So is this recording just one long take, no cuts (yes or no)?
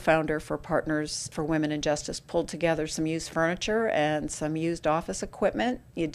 no